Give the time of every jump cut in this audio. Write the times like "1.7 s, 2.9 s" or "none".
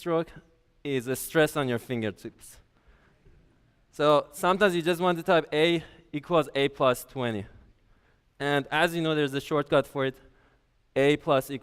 4.8 s